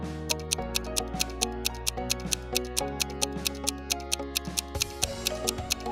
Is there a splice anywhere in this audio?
no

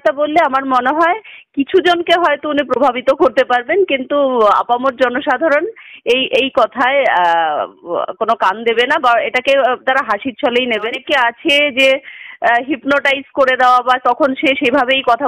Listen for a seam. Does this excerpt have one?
yes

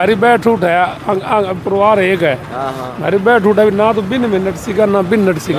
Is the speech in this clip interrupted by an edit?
no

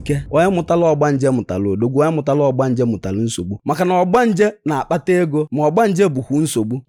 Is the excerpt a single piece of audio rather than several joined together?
yes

